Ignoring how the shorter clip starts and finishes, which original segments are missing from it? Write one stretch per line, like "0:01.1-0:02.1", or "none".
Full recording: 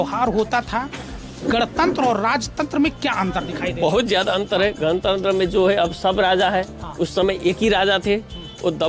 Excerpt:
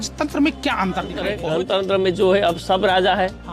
0:03.7-0:04.6